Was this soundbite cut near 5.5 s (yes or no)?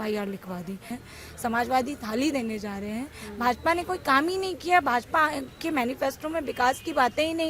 no